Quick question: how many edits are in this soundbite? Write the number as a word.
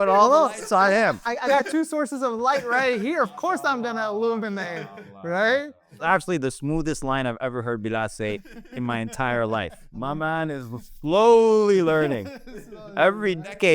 two